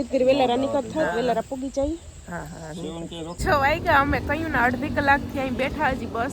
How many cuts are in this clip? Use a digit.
1